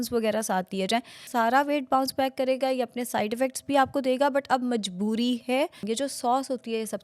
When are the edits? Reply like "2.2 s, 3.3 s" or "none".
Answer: 1.3 s, 5.8 s